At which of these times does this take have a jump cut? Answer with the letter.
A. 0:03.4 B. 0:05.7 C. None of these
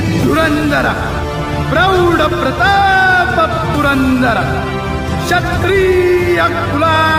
C